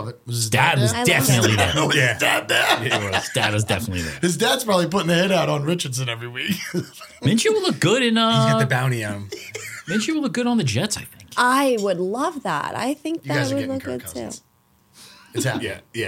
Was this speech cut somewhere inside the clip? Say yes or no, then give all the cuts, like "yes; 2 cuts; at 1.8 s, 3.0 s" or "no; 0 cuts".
no; 0 cuts